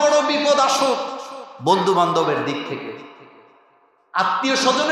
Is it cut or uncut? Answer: uncut